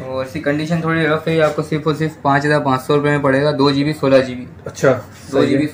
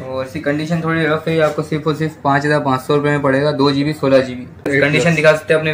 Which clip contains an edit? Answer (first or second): second